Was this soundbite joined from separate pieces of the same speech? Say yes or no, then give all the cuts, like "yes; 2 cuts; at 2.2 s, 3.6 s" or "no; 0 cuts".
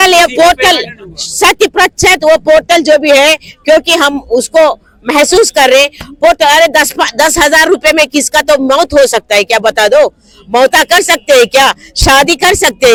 no; 0 cuts